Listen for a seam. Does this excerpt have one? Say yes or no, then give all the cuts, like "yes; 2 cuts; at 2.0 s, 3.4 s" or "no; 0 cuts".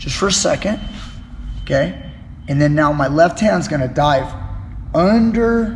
no; 0 cuts